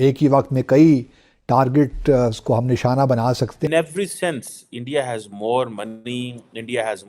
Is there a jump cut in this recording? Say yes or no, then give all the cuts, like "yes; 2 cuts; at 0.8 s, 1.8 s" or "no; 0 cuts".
yes; 1 cut; at 3.7 s